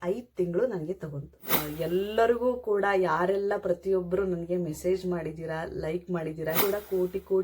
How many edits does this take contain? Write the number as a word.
two